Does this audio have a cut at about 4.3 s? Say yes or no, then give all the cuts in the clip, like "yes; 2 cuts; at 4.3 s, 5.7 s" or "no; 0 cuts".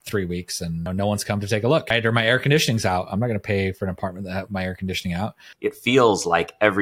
no; 3 cuts; at 0.9 s, 1.9 s, 5.5 s